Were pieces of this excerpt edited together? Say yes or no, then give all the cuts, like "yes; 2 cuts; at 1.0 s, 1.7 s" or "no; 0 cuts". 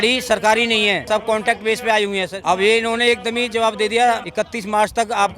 yes; 3 cuts; at 1.0 s, 2.4 s, 4.3 s